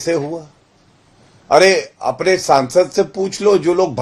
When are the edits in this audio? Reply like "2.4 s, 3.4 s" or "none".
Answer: none